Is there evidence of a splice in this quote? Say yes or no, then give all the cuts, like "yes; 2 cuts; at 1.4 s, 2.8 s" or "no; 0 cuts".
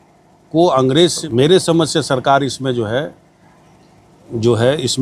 yes; 1 cut; at 1.2 s